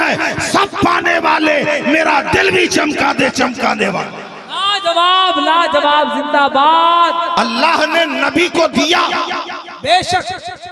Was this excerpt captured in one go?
no; 1 cut; at 7.5 s

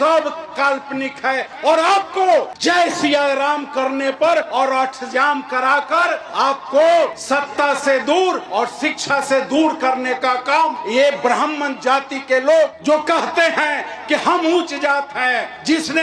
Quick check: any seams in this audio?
yes; 7 cuts; at 2.5 s, 4.5 s, 6.2 s, 7.2 s, 8.4 s, 10.8 s, 12.8 s

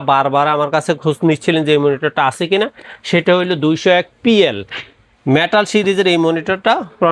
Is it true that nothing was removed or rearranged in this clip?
yes; 0 cuts

